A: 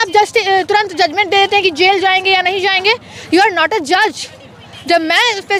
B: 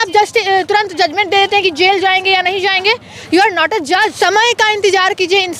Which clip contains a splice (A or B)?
B